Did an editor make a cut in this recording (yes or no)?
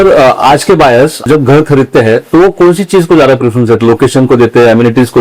yes